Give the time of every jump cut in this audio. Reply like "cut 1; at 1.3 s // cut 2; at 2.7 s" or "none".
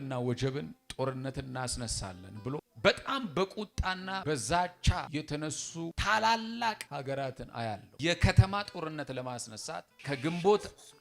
cut 1; at 2.7 s // cut 2; at 4.2 s // cut 3; at 5.3 s // cut 4; at 6.8 s // cut 5; at 7.9 s // cut 6; at 9.9 s